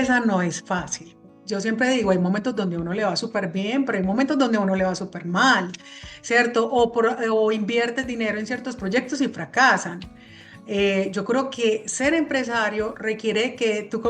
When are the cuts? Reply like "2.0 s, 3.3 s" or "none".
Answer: 1.3 s